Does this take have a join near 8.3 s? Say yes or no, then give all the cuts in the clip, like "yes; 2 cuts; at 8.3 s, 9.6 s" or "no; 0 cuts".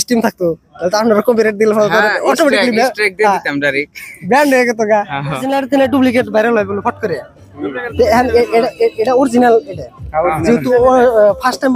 no; 1 cut; at 5.5 s